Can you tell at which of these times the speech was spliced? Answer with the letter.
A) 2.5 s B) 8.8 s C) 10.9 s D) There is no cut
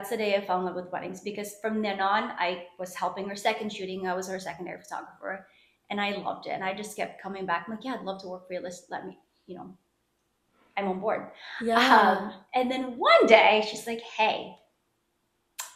D